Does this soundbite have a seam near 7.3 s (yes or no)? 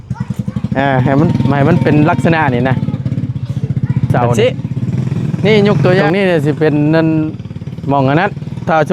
no